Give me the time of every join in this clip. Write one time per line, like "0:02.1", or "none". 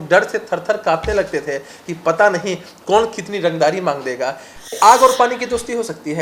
0:04.8

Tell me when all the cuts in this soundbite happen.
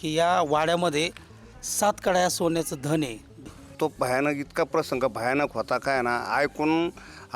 0:03.4

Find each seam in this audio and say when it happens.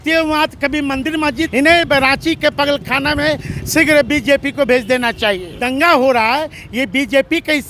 0:01.5
0:05.6

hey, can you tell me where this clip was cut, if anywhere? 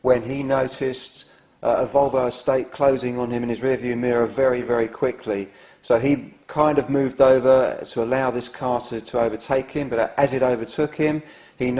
0:03.4

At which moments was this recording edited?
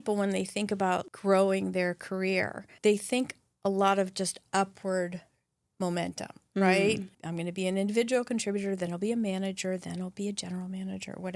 0:01.1
0:02.7
0:07.1

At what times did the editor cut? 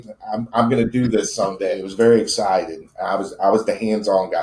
0:01.8

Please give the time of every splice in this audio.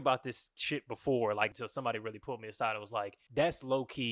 0:01.5
0:03.2

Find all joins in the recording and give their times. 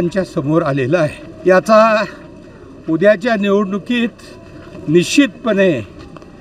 0:01.3

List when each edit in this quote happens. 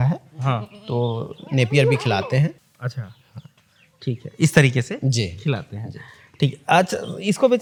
none

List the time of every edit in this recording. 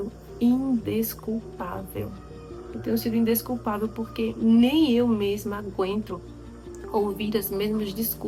none

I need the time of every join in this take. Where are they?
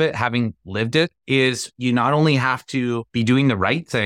0:01.5
0:03.1

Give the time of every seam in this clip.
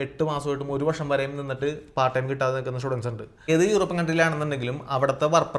0:03.5

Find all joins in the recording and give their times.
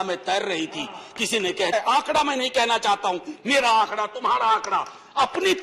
0:01.7

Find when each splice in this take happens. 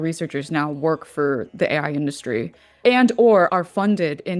0:02.8
0:03.5

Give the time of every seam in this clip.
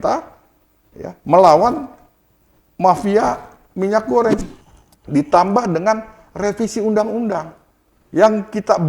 0:04.4

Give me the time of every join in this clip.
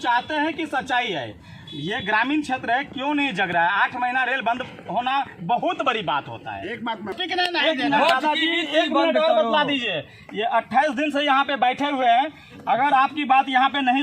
0:07.2

